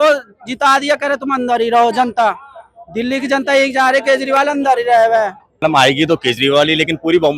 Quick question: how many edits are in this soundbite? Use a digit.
1